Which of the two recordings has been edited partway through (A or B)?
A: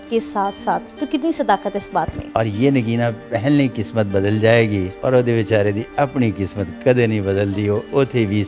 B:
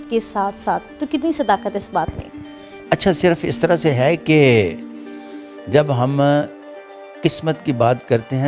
A